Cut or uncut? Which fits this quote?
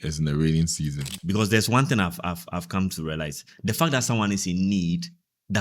cut